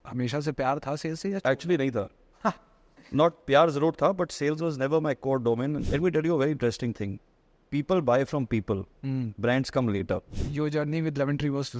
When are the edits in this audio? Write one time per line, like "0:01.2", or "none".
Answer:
0:05.8
0:10.3